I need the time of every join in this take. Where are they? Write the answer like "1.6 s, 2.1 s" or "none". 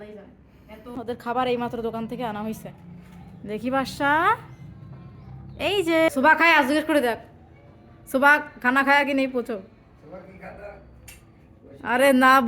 1.0 s, 6.1 s

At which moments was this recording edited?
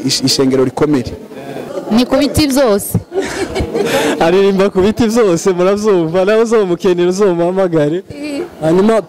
1.7 s

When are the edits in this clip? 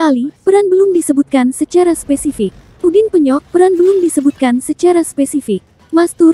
2.7 s

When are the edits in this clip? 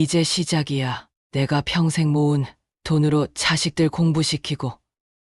1.1 s

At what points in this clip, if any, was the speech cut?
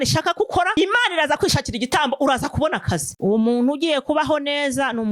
3.1 s

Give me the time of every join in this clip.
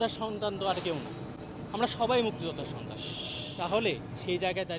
none

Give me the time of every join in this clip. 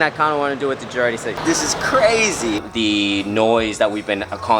1.3 s, 2.6 s

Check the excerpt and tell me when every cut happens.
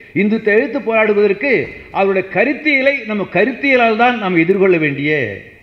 none

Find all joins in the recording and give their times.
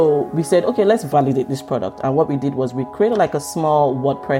1.0 s

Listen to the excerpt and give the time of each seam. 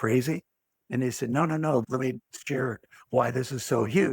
1.8 s

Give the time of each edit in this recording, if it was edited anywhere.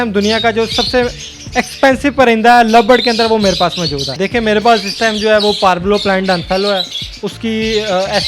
4.0 s

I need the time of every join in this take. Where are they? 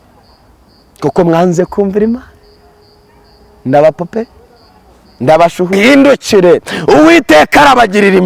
5.7 s

